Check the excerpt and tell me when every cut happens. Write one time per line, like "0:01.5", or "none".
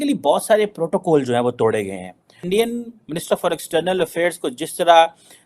0:02.4